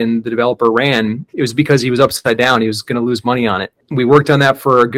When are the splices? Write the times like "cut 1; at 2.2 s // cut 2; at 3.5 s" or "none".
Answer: cut 1; at 1.2 s // cut 2; at 3.7 s